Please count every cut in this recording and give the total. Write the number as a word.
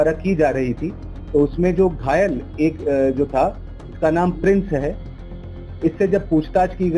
zero